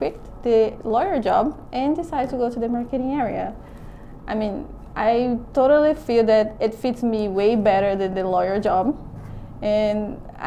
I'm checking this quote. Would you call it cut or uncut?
uncut